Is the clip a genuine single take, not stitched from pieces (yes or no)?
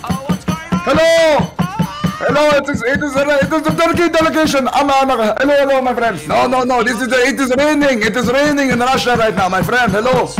yes